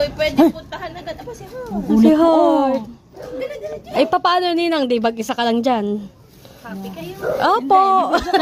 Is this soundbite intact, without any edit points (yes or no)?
yes